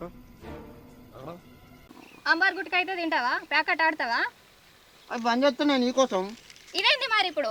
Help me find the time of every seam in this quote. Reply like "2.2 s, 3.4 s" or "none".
1.8 s